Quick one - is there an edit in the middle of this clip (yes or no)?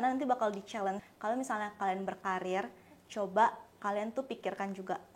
yes